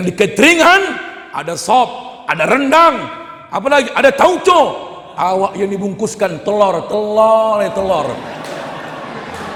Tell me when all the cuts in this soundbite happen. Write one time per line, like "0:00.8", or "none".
none